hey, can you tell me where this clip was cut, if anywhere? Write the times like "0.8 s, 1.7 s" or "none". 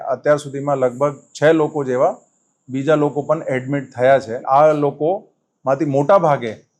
4.3 s